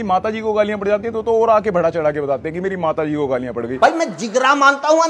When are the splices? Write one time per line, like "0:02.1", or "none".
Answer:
0:03.7